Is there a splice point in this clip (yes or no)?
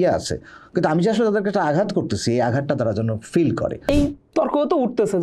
yes